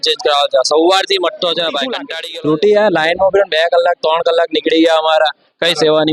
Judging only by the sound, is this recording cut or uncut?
uncut